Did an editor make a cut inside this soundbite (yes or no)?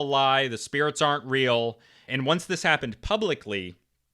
yes